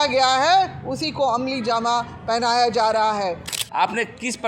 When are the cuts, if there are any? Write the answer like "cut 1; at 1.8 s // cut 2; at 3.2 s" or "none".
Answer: cut 1; at 3.4 s